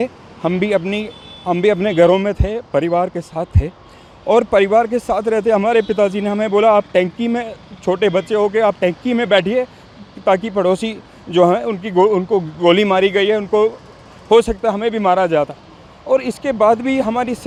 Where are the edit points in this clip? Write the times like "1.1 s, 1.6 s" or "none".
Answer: none